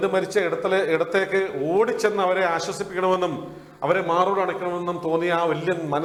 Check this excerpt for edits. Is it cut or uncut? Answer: uncut